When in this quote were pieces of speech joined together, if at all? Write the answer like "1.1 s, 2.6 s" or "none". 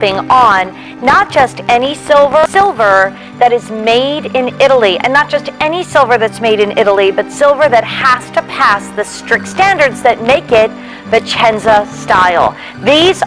2.4 s